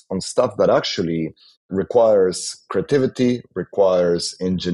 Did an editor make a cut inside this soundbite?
yes; 1 cut; at 1.7 s

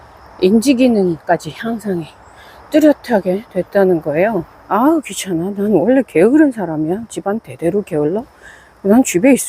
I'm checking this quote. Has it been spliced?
yes; 1 cut; at 4.6 s

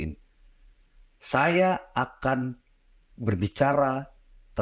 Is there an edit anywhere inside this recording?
no; 0 cuts

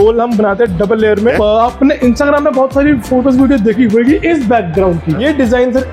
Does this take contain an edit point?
yes; 2 cuts; at 1.3 s, 5.2 s

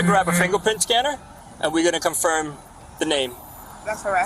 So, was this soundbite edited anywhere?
no; 0 cuts

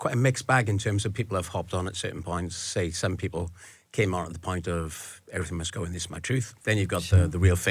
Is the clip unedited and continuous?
no; 1 cut; at 6.5 s

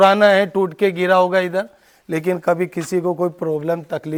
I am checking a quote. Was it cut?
no; 0 cuts

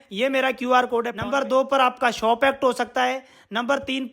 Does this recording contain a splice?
yes; 1 cut; at 1.2 s

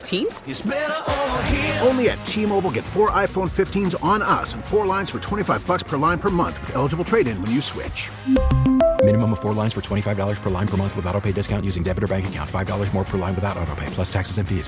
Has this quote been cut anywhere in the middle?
no; 0 cuts

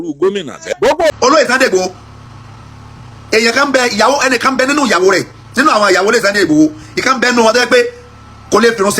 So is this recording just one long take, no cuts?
no; 1 cut; at 1.1 s

